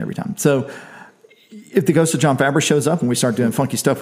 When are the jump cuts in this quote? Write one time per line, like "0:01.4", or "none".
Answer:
none